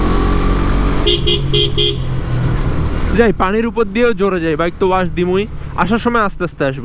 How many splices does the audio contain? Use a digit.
0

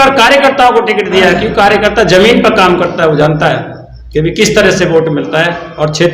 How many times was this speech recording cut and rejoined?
0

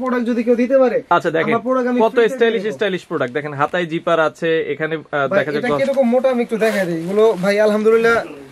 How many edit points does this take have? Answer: 0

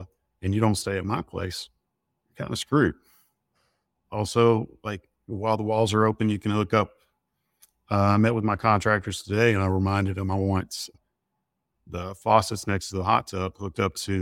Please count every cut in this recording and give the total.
0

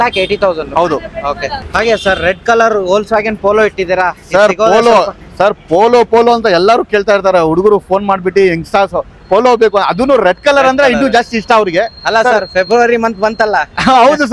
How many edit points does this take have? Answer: 0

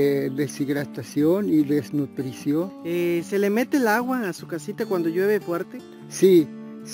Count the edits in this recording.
1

